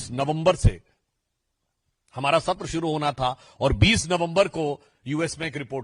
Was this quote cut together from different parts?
no; 0 cuts

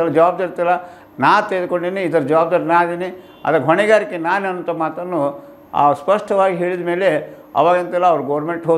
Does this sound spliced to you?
no; 0 cuts

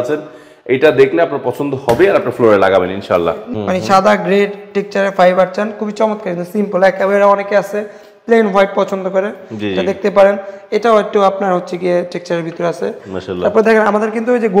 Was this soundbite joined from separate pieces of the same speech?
yes; 1 cut; at 3.5 s

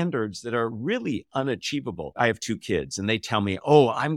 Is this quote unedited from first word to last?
yes; 0 cuts

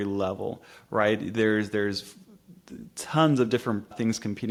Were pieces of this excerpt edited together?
no; 0 cuts

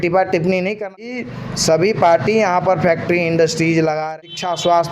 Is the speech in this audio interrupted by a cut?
yes; 2 cuts; at 1.1 s, 4.0 s

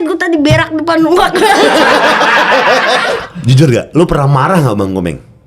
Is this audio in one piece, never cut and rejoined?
no; 1 cut; at 3.1 s

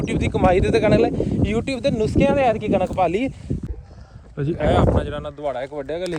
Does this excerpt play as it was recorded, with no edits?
no; 1 cut; at 3.6 s

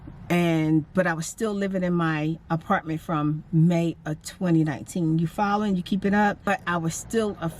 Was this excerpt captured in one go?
no; 1 cut; at 6.5 s

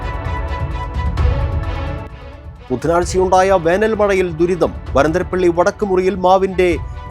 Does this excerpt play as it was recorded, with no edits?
no; 1 cut; at 2.2 s

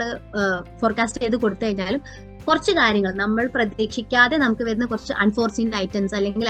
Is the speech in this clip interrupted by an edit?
no; 0 cuts

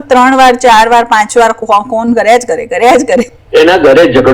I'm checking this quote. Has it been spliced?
yes; 1 cut; at 3.3 s

